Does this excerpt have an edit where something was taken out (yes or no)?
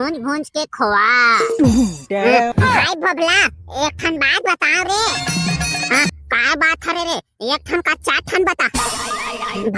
no